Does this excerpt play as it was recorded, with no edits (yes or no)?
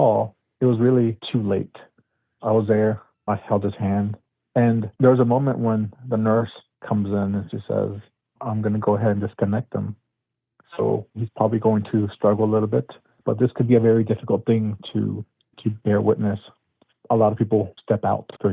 no